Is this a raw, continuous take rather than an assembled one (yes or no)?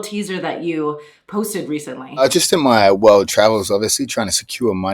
no